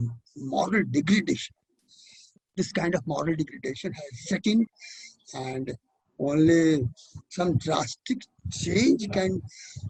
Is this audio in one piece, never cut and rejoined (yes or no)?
yes